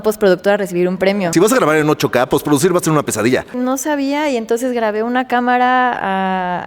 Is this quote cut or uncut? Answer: cut